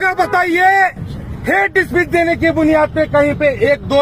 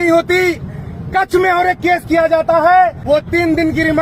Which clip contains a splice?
second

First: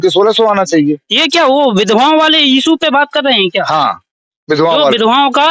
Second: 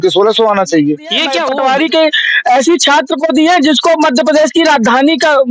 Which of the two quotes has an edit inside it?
second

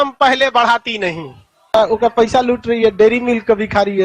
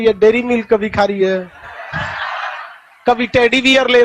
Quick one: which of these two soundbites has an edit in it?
first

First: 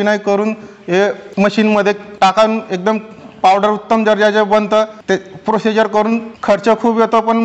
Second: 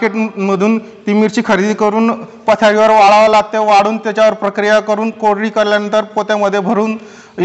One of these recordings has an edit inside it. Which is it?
first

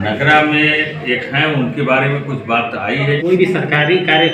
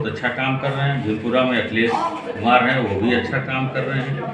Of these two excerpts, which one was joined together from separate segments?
first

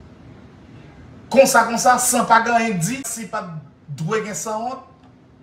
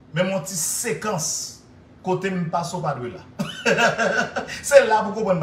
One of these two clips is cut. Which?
first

